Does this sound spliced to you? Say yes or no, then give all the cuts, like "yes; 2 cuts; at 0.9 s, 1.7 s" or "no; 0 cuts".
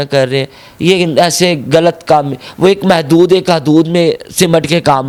no; 0 cuts